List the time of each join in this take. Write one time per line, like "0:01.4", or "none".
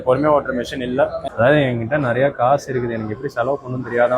0:01.2